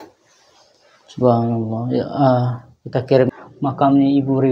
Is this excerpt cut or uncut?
cut